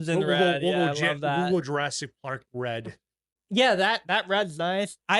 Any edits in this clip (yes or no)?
yes